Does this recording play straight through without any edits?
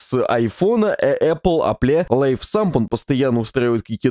no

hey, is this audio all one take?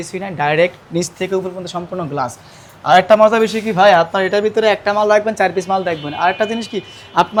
yes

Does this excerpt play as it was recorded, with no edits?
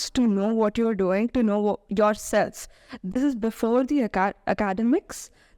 yes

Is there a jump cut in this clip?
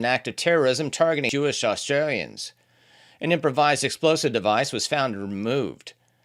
yes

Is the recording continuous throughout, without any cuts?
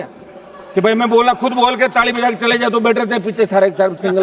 yes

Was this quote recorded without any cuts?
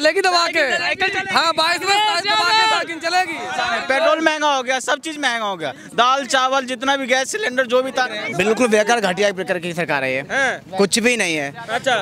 no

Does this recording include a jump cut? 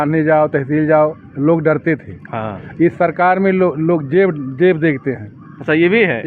no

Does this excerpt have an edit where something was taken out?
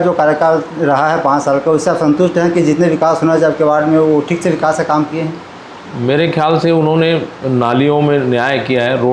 no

